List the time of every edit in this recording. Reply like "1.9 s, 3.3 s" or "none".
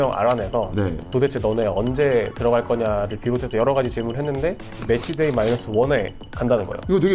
1.1 s, 4.8 s

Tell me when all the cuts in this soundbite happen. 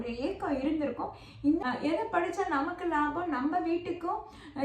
1.6 s

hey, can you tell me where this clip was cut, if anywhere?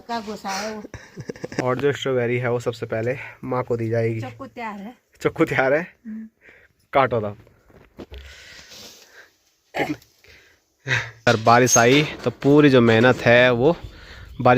1.5 s, 11.2 s

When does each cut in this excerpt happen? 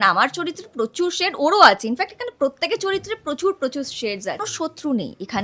4.5 s

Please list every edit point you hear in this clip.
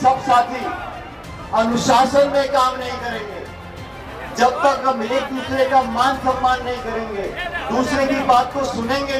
none

